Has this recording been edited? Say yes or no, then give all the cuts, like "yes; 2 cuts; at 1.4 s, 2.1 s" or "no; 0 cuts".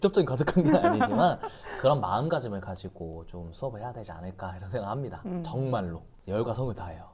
no; 0 cuts